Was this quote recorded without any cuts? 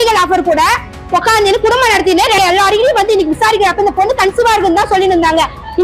no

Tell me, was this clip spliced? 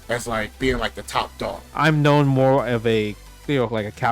yes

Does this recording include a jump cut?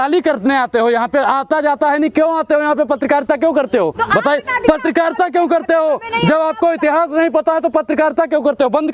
no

